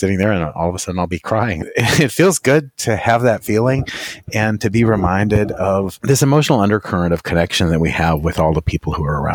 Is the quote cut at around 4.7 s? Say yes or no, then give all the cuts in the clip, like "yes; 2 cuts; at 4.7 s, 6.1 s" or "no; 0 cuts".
no; 2 cuts; at 1.7 s, 5.9 s